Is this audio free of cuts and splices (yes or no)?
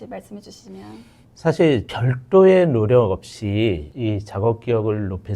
yes